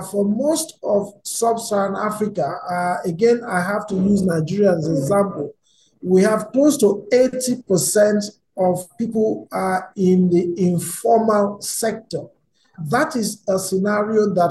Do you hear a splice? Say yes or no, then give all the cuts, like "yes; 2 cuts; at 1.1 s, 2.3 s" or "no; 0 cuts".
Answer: yes; 2 cuts; at 8.9 s, 12.8 s